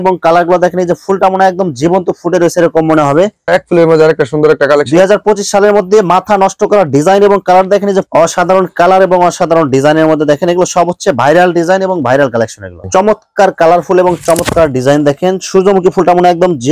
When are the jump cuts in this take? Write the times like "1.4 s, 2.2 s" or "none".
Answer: 3.4 s, 8.1 s, 12.8 s